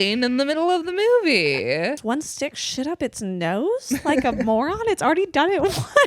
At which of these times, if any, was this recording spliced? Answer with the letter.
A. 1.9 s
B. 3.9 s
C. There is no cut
A